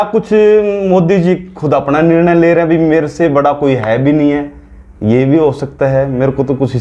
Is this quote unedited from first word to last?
yes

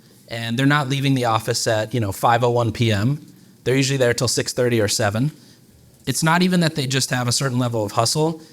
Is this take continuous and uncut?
no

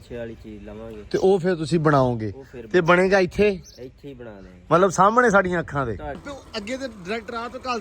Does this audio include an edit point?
yes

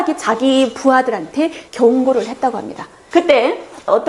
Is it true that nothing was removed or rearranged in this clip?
no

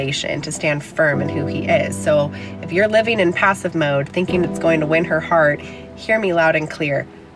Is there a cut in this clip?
no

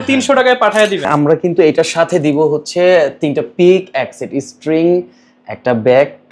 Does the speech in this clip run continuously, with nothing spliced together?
no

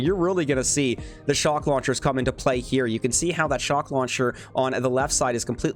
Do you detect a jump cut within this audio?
no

